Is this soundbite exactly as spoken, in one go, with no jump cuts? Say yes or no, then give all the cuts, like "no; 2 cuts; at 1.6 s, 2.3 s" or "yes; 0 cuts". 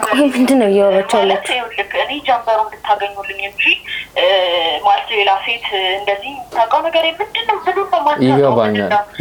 yes; 0 cuts